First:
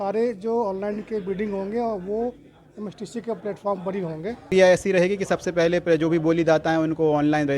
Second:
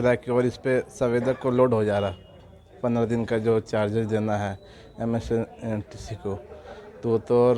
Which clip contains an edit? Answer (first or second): first